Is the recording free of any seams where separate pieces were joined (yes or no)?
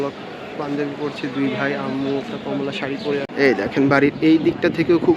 no